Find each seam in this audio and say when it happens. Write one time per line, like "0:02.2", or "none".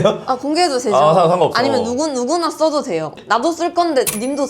0:03.2